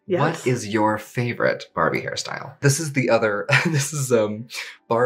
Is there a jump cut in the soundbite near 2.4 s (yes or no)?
yes